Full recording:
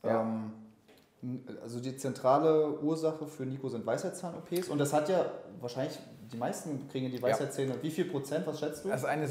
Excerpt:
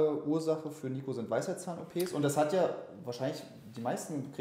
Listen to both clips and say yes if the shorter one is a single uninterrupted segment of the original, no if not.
yes